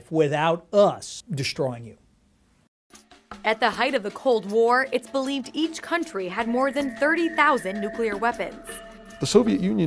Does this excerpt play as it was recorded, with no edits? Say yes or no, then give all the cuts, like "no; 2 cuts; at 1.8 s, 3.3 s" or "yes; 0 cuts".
no; 1 cut; at 4.0 s